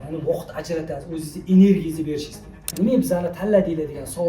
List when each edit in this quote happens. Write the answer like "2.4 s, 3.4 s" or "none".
2.7 s